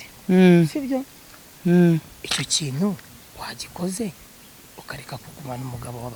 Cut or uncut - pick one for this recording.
uncut